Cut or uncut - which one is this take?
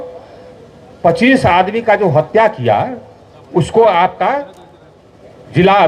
uncut